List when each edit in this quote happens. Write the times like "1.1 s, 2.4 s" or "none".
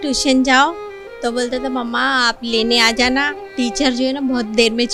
none